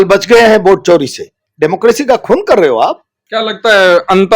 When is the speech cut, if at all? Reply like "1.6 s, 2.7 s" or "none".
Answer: 1.3 s, 3.1 s